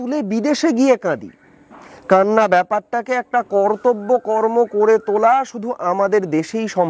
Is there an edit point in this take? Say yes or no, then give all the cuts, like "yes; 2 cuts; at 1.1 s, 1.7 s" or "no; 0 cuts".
no; 0 cuts